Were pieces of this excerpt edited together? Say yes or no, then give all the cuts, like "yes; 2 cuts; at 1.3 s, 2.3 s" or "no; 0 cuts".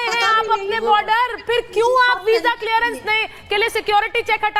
no; 0 cuts